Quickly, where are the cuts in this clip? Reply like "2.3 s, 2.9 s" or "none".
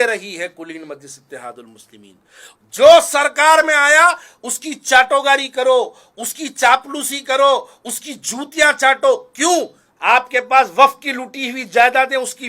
2.5 s, 9.9 s